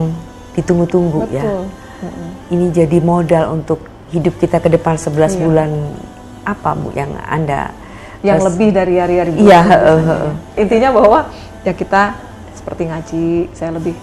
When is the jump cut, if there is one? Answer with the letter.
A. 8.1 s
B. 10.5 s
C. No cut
B